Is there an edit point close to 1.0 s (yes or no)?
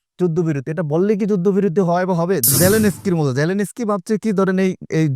no